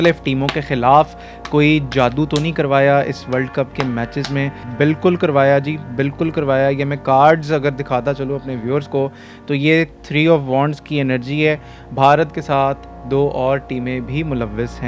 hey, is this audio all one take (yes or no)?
yes